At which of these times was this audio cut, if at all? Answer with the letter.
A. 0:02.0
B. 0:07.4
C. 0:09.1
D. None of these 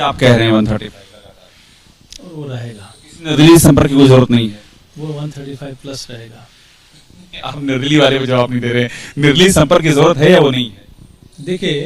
D